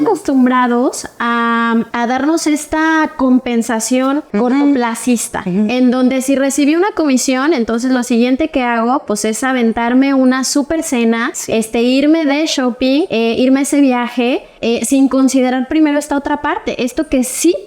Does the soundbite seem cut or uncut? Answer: cut